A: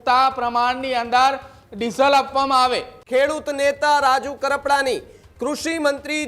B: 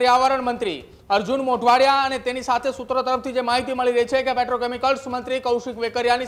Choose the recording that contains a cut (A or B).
A